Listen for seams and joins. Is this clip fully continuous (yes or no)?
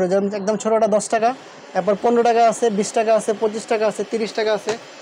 yes